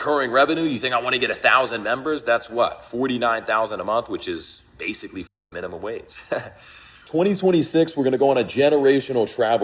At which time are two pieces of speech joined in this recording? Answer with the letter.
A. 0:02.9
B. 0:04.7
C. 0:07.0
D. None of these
C